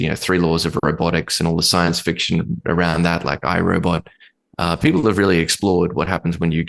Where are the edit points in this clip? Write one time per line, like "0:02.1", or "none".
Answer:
none